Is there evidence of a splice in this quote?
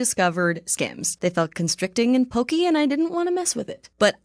yes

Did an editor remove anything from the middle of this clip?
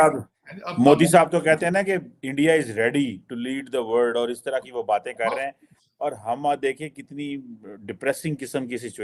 no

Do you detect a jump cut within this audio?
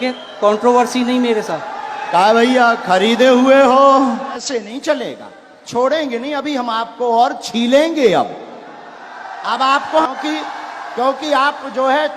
yes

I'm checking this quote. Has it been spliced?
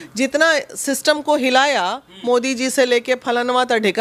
no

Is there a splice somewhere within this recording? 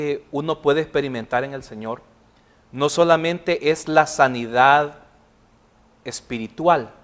yes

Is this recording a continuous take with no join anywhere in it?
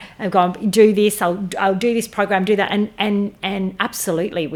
yes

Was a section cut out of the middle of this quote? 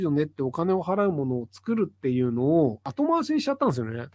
yes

